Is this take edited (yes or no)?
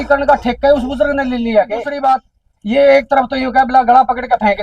yes